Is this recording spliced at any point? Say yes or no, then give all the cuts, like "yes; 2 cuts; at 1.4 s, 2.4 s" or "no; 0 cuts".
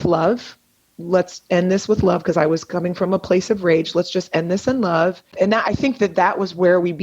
yes; 1 cut; at 5.3 s